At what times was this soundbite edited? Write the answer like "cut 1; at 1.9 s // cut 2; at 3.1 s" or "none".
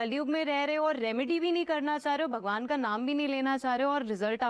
none